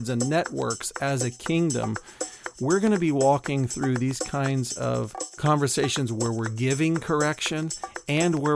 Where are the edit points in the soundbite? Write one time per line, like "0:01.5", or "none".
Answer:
0:05.2